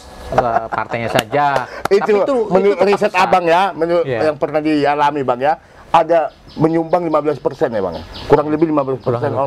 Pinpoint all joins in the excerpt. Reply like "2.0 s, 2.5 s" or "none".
none